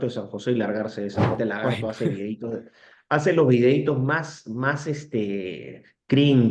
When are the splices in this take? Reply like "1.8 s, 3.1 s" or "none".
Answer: 1.4 s